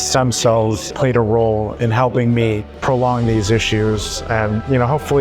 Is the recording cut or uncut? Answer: cut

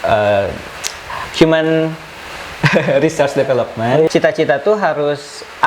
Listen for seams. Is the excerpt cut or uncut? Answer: cut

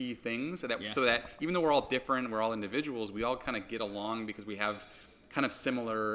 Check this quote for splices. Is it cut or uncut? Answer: uncut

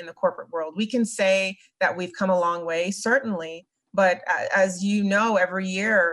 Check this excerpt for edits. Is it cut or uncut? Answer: uncut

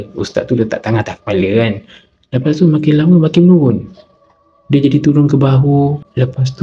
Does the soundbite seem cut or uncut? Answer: uncut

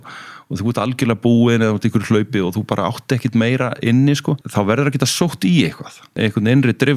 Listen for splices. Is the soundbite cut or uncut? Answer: cut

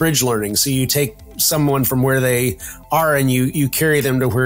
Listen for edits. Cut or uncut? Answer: uncut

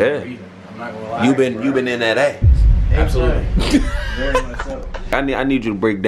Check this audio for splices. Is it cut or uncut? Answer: cut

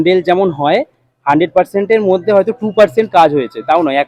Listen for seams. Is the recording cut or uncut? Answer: uncut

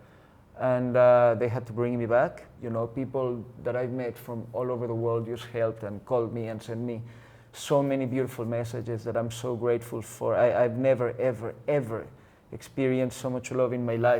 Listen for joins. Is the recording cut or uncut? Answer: cut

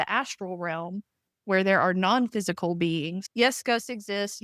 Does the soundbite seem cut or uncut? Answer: cut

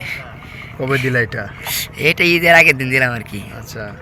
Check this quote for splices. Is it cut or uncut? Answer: uncut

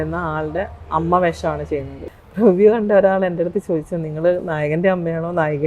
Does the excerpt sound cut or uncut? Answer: cut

